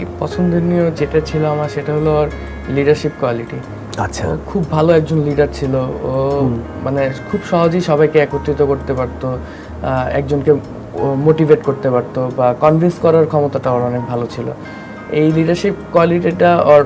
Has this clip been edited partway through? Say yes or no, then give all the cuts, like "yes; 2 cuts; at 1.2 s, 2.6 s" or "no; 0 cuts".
no; 0 cuts